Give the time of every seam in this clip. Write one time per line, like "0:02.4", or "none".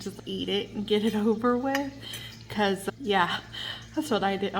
none